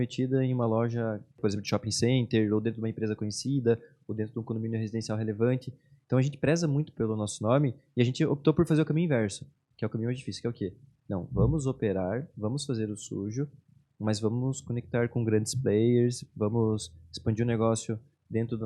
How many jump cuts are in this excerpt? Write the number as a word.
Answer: one